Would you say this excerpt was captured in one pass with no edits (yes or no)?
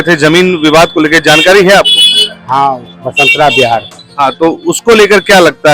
no